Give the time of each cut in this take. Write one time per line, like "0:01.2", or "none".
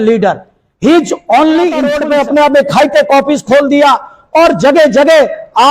0:02.0